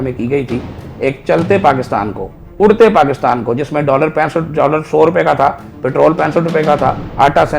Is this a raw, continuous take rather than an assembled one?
yes; 0 cuts

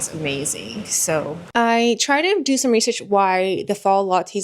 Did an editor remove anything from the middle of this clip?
yes; 1 cut; at 1.4 s

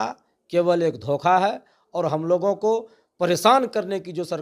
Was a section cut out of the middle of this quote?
no; 0 cuts

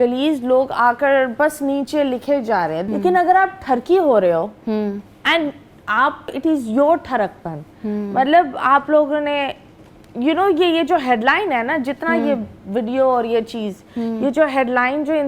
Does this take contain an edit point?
yes; 2 cuts; at 2.8 s, 6.4 s

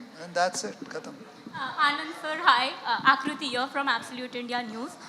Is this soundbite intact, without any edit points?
yes; 0 cuts

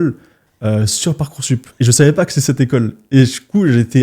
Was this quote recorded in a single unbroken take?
yes; 0 cuts

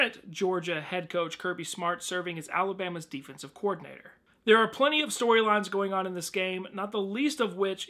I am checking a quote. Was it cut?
no; 0 cuts

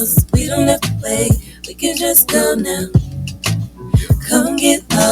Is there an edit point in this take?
yes; 2 cuts; at 2.6 s, 4.0 s

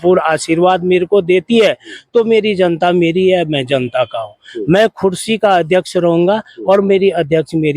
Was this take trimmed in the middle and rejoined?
no; 0 cuts

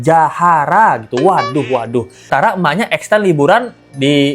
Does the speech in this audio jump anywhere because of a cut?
yes; 1 cut; at 2.3 s

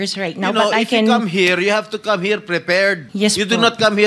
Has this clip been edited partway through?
yes; 1 cut; at 3.1 s

